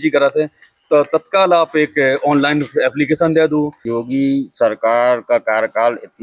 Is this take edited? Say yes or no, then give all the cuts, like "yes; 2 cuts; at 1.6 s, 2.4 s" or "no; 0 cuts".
yes; 1 cut; at 3.8 s